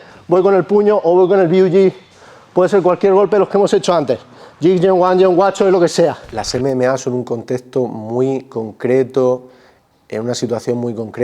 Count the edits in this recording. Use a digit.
1